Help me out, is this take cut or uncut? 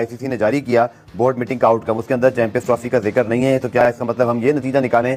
uncut